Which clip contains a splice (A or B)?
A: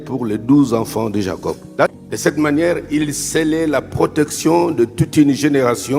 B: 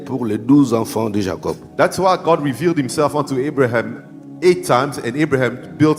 A